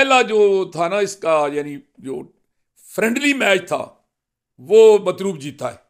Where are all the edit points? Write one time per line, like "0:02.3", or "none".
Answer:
none